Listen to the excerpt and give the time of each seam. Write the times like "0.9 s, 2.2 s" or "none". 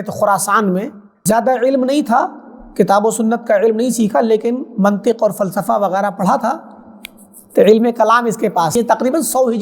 1.1 s, 8.7 s